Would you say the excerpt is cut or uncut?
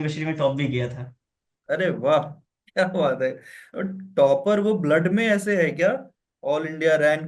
uncut